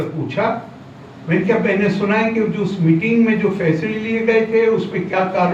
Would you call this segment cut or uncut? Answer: uncut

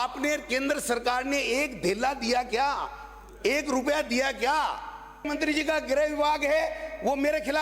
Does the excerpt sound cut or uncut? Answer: cut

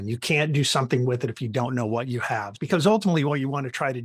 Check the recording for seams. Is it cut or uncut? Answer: cut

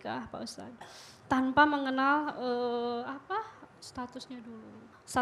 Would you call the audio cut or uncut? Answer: uncut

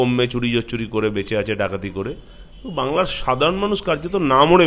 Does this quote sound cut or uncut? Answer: uncut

